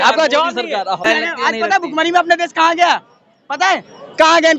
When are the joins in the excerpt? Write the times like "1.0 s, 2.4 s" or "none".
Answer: 1.0 s

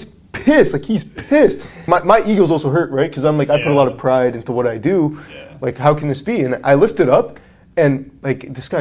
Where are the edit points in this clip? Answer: 1.8 s

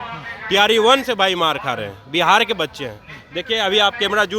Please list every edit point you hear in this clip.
none

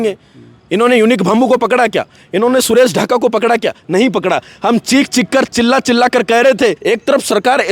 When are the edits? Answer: 6.8 s

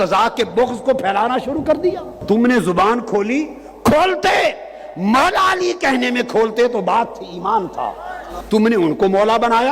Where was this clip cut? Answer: 2.2 s, 8.3 s

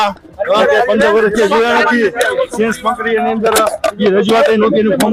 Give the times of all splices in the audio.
none

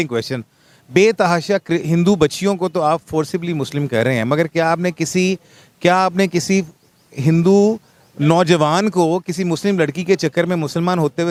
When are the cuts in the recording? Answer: none

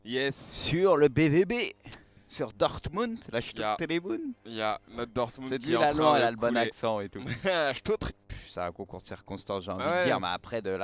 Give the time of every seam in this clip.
none

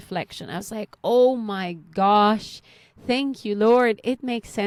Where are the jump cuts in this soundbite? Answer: none

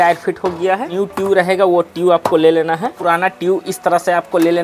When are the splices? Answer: 0.9 s, 2.9 s

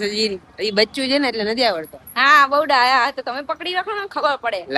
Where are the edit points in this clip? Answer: none

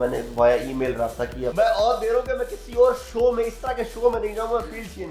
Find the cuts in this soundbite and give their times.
1.5 s

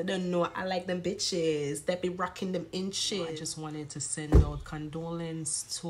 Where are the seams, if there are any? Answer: 3.2 s

